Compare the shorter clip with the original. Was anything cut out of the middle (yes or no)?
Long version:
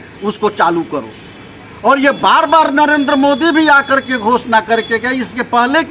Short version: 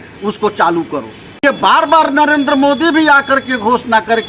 yes